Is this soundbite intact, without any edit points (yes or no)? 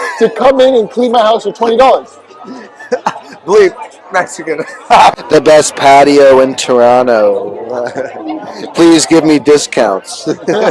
no